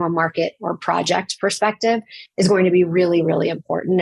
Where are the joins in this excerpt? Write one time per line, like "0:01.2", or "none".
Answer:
none